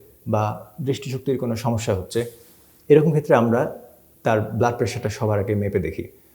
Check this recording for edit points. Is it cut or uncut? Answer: uncut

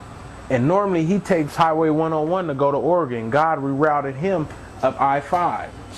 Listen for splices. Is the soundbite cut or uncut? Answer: cut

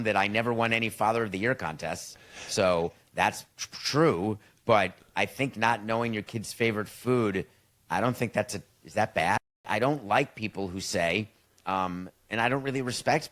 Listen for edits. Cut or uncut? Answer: cut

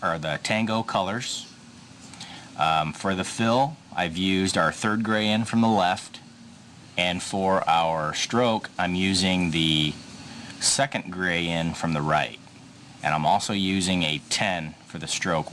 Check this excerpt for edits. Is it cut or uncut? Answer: cut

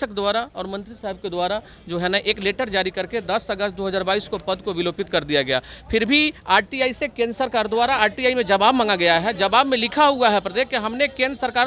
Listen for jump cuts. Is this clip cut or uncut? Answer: uncut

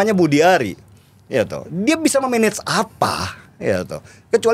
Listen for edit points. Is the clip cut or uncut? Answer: uncut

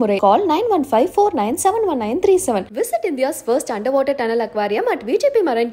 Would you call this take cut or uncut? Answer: uncut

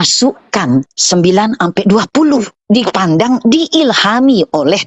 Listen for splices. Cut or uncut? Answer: cut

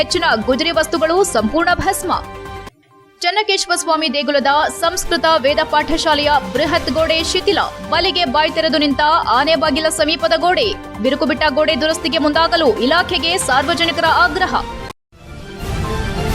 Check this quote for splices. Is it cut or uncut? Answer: cut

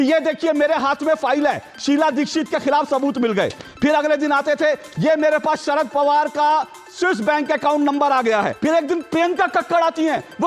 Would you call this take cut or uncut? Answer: cut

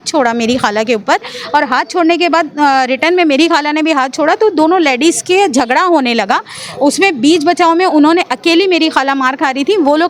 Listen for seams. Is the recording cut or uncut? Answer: uncut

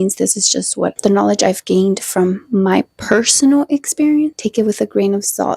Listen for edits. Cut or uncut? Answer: cut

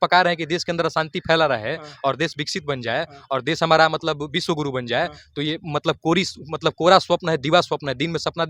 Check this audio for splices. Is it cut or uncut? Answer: uncut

